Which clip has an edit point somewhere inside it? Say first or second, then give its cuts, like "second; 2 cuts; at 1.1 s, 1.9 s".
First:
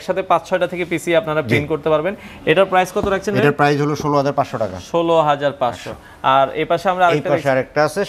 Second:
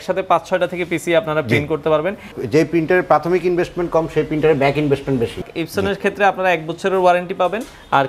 second; 2 cuts; at 2.4 s, 5.4 s